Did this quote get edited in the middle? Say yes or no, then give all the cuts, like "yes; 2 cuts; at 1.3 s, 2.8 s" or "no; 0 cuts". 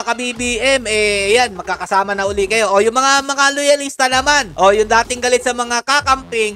no; 0 cuts